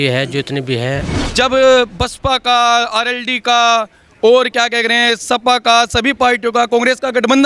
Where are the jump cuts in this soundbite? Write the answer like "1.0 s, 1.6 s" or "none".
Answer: 1.2 s